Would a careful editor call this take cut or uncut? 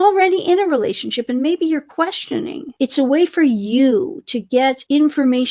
uncut